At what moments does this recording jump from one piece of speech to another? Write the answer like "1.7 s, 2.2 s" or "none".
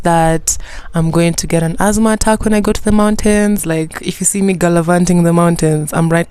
3.6 s